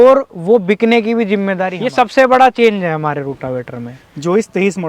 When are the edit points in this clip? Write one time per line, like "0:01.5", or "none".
0:01.8